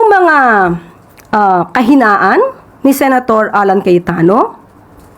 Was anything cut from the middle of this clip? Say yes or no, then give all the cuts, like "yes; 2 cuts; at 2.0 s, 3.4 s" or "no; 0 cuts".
yes; 1 cut; at 2.6 s